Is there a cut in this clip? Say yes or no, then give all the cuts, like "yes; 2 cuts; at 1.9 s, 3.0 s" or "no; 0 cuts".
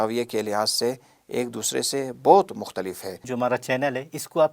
yes; 1 cut; at 3.3 s